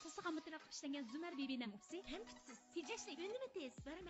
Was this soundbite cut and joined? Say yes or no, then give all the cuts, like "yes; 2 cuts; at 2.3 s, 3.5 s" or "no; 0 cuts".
yes; 1 cut; at 2.0 s